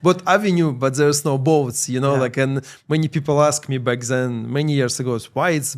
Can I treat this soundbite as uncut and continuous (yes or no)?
yes